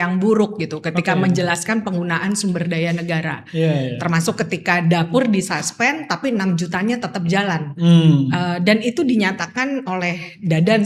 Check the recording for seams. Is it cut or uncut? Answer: uncut